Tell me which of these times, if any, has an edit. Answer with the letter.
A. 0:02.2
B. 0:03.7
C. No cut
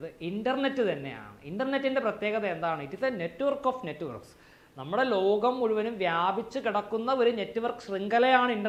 C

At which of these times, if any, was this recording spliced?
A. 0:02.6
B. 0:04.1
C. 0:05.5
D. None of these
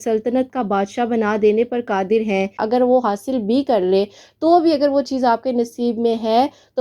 A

